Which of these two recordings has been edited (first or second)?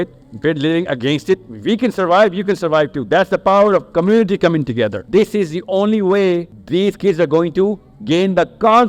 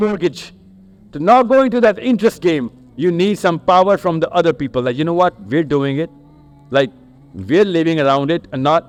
first